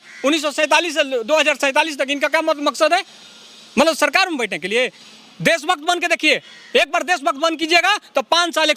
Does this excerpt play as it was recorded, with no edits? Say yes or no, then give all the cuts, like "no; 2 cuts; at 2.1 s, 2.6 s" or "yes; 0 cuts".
yes; 0 cuts